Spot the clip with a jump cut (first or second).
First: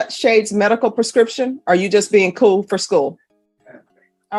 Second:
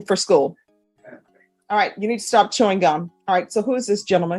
second